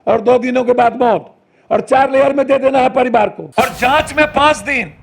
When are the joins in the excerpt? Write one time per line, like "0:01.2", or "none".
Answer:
0:03.4